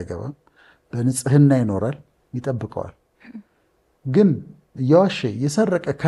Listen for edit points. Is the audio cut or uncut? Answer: uncut